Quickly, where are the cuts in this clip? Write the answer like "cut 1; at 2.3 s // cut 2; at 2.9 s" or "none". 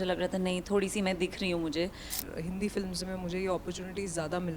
cut 1; at 2.2 s